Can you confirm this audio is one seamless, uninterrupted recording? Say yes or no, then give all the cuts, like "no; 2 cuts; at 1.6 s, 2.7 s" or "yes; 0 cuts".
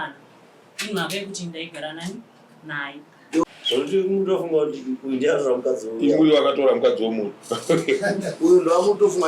no; 1 cut; at 3.4 s